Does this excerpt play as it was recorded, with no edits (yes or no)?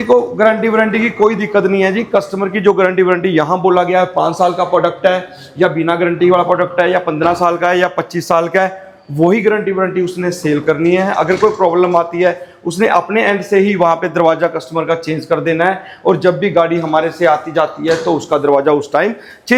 yes